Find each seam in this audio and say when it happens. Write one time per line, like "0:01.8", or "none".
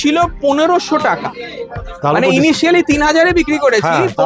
none